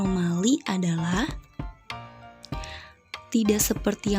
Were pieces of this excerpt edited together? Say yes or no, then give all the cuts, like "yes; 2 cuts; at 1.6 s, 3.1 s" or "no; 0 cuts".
yes; 2 cuts; at 1.3 s, 3.3 s